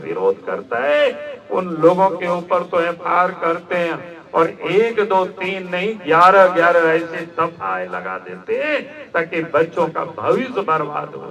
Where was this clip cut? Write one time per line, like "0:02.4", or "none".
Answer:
none